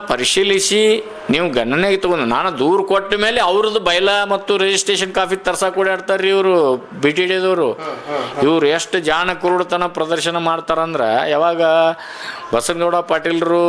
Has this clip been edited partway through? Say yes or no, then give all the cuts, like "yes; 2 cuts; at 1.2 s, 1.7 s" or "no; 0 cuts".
no; 0 cuts